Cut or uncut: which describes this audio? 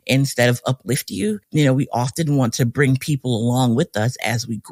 uncut